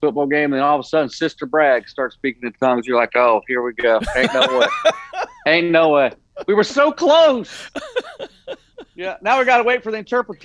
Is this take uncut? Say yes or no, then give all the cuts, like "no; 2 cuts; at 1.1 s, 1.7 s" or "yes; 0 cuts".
yes; 0 cuts